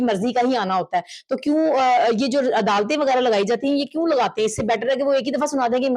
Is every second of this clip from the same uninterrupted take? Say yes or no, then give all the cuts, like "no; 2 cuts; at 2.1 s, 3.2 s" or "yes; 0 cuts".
yes; 0 cuts